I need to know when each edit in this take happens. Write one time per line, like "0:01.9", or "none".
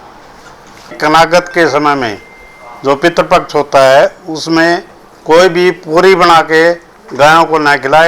0:01.0